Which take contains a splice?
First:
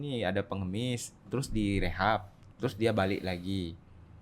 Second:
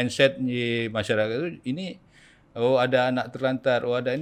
first; 1 cut; at 1.3 s

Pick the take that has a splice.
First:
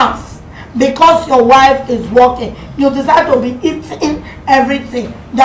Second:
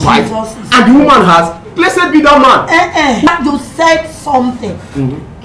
second; 2 cuts; at 1.6 s, 3.3 s

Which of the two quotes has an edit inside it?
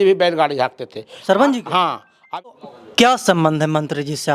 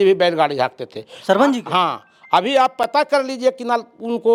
first; 1 cut; at 2.5 s

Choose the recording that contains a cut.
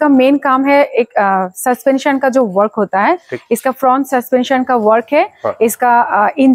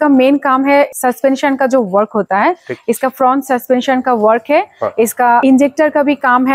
second; 2 cuts; at 0.9 s, 5.4 s

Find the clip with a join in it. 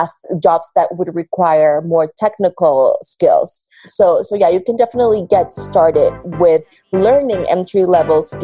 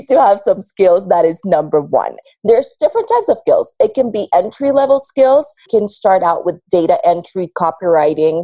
second; 2 cuts; at 2.2 s, 5.6 s

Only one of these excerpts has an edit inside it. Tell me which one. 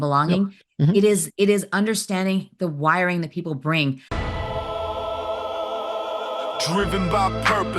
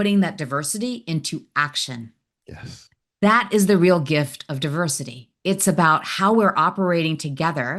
first; 1 cut; at 4.1 s

